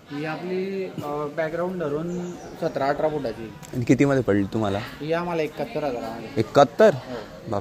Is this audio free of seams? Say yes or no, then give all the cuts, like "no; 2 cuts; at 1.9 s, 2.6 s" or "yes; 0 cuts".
yes; 0 cuts